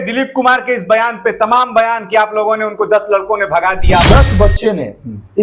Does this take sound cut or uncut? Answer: cut